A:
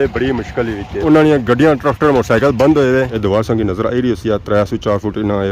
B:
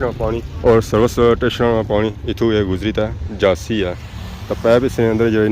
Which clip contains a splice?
A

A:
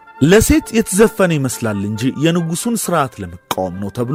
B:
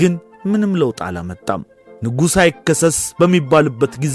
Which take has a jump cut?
B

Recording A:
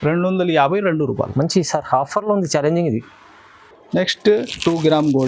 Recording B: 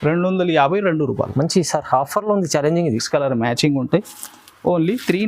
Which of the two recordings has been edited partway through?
B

